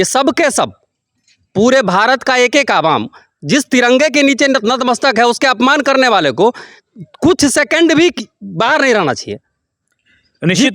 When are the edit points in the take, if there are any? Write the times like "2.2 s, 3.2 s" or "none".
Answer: none